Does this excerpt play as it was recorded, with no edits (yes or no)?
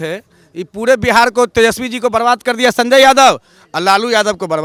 yes